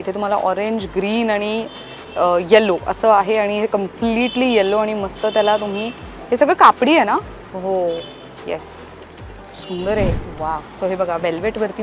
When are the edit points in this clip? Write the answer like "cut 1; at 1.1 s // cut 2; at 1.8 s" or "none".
cut 1; at 10.1 s